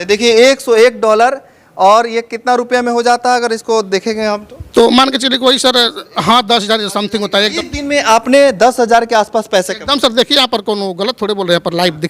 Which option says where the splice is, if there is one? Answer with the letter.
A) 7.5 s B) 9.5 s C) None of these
A